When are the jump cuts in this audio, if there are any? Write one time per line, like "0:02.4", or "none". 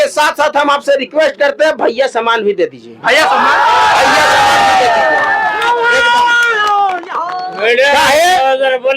none